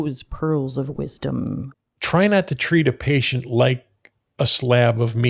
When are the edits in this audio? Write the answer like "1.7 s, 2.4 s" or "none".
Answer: 1.7 s

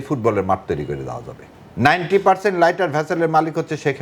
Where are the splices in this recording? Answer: 1.7 s

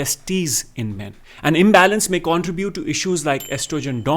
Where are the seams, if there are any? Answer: 1.1 s

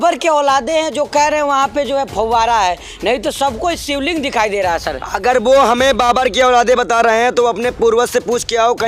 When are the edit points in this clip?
none

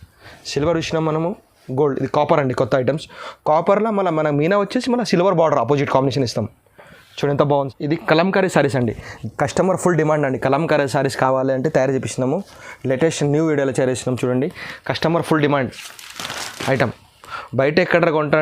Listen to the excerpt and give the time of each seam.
7.7 s

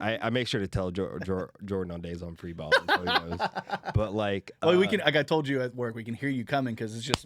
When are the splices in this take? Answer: none

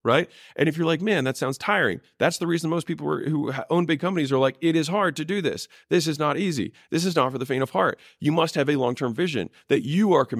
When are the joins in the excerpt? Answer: none

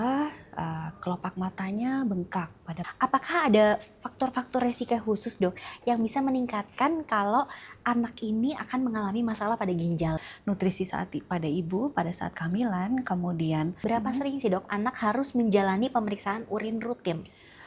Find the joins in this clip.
2.8 s, 10.2 s, 13.8 s

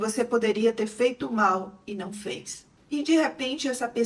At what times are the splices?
none

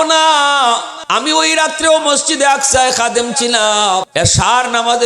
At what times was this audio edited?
0.9 s, 4.1 s

